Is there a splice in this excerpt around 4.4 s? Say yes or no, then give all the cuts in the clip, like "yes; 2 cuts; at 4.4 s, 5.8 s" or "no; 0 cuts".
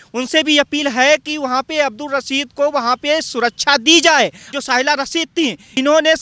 yes; 1 cut; at 4.4 s